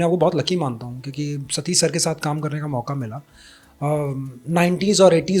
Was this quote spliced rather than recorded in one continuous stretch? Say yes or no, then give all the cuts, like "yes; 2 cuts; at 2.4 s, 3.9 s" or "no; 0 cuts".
no; 0 cuts